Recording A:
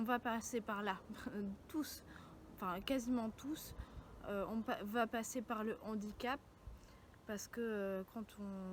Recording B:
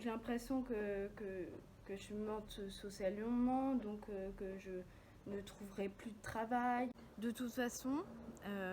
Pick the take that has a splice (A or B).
B